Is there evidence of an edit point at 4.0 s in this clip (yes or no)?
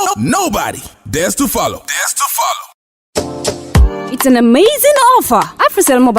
no